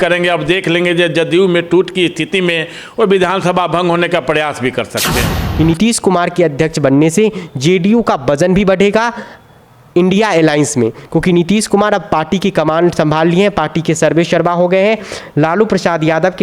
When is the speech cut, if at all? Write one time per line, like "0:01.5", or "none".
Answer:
0:05.4